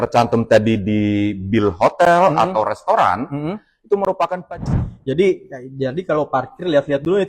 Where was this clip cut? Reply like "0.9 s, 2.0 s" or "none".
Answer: 4.5 s